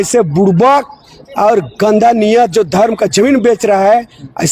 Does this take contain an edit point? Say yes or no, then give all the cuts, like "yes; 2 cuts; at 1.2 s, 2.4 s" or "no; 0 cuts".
no; 0 cuts